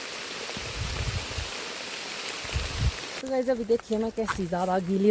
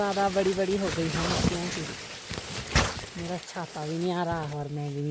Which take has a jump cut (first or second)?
first